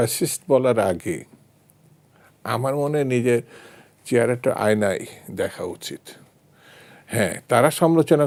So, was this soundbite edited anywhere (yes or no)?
no